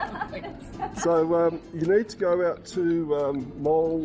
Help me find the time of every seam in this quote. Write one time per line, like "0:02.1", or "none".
none